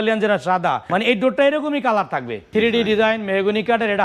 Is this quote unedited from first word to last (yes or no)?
no